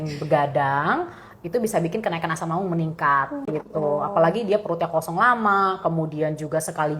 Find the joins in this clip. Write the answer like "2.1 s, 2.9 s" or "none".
3.4 s